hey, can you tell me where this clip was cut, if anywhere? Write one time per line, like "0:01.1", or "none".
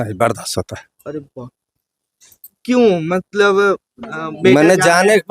0:02.6